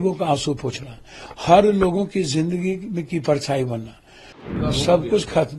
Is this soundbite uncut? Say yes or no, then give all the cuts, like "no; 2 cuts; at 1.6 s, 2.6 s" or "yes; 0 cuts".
no; 1 cut; at 4.5 s